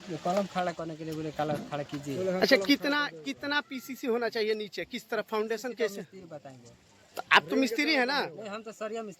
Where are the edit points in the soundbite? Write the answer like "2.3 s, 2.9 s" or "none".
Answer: none